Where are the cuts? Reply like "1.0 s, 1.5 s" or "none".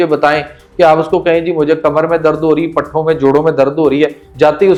none